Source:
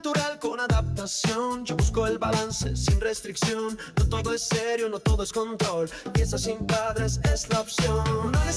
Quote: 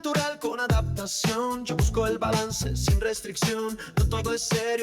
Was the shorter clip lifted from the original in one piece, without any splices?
yes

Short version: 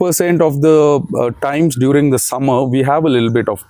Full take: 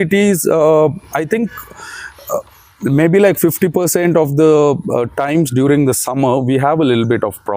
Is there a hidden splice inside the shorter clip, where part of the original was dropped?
no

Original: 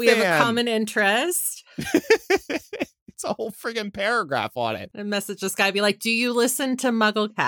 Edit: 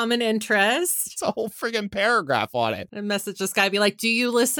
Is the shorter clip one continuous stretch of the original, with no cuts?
no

